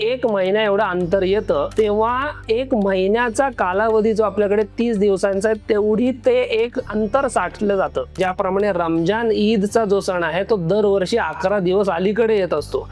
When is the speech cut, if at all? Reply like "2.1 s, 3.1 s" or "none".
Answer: 1.7 s, 8.2 s